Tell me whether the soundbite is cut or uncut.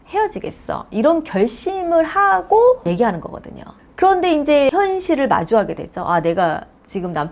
uncut